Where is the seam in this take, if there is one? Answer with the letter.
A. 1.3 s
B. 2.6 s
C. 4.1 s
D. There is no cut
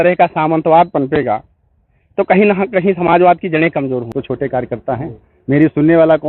C